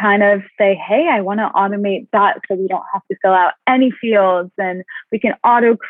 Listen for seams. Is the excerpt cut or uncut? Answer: uncut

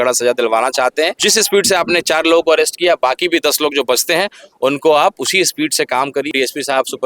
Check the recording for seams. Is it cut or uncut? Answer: cut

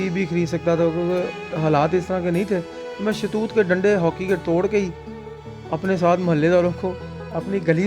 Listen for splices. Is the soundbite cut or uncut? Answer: uncut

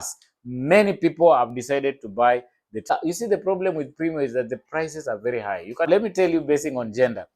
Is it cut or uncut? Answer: cut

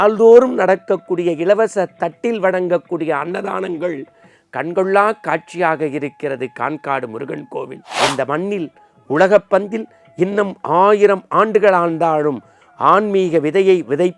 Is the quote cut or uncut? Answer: cut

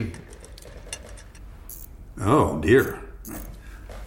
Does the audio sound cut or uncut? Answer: uncut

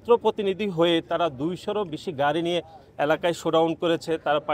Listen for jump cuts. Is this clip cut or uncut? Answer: uncut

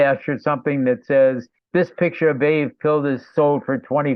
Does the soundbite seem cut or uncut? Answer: uncut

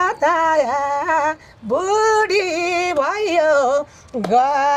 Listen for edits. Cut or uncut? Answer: uncut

